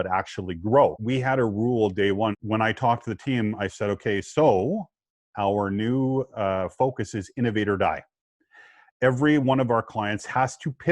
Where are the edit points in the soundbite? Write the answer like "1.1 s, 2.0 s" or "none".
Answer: 1.0 s, 2.4 s